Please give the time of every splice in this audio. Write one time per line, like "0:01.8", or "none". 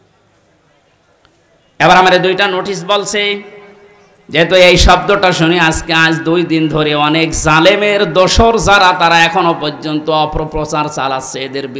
none